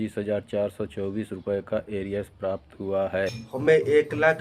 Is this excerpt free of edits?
no; 1 cut; at 3.4 s

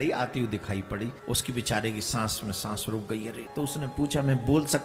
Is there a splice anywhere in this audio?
yes; 2 cuts; at 1.2 s, 3.4 s

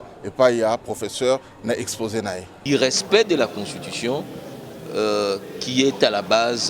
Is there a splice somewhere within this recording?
yes; 1 cut; at 2.6 s

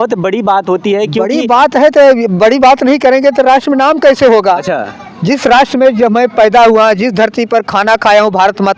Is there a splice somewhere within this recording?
no; 0 cuts

